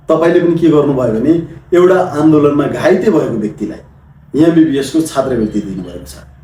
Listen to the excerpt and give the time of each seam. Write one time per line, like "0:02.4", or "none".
none